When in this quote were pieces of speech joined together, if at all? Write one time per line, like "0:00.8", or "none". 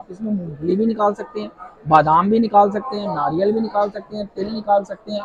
none